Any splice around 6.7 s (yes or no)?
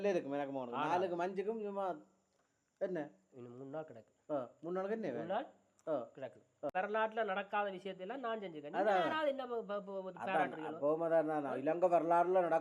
yes